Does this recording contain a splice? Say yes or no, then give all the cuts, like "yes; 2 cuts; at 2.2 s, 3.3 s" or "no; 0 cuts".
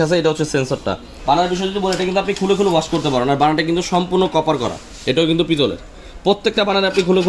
yes; 1 cut; at 1.1 s